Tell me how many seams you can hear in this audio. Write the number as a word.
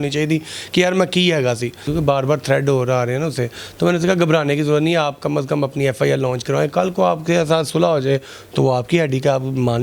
one